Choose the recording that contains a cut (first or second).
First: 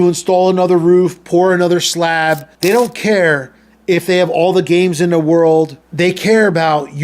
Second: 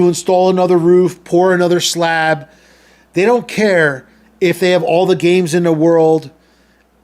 first